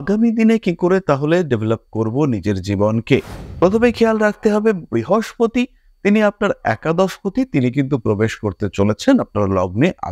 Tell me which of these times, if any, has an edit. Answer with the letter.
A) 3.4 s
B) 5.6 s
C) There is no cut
A